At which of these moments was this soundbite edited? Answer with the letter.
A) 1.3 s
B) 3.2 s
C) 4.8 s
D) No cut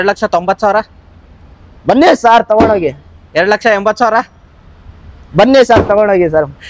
D